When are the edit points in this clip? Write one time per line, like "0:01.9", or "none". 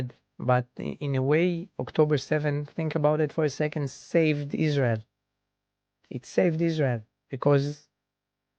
none